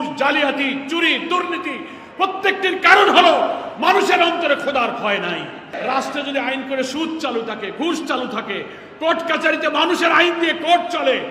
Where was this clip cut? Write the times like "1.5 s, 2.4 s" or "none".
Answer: 5.6 s